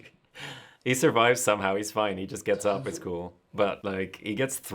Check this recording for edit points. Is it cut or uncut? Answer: cut